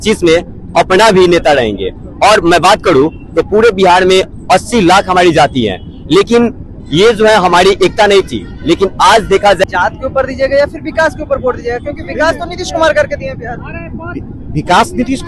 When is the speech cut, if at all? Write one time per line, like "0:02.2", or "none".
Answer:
0:09.6